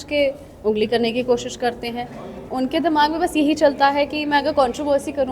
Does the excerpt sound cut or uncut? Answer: cut